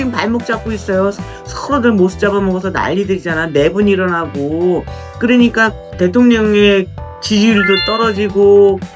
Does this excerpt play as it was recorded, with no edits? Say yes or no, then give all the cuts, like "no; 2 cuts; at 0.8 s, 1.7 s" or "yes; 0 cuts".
yes; 0 cuts